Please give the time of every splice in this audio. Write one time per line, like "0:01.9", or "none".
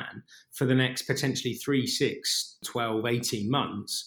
0:02.6